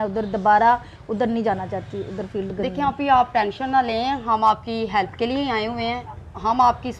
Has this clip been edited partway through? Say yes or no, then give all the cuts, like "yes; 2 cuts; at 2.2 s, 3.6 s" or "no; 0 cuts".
no; 0 cuts